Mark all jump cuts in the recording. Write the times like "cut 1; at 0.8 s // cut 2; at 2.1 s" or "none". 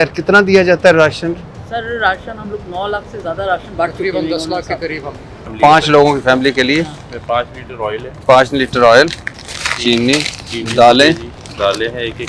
cut 1; at 5.4 s